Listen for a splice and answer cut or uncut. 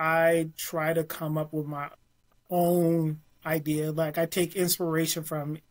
uncut